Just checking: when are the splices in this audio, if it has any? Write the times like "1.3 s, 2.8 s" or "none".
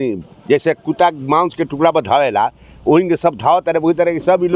none